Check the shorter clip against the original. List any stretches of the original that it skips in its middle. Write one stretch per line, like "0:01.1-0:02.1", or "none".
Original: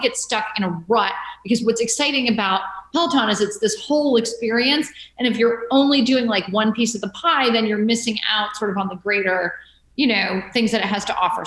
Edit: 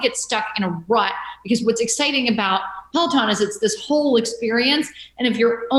none